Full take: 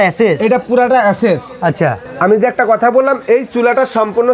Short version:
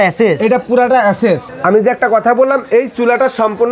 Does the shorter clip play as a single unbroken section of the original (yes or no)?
no